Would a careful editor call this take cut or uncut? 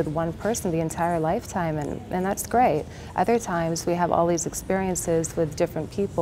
uncut